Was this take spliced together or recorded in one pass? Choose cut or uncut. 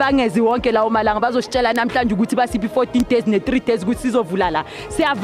uncut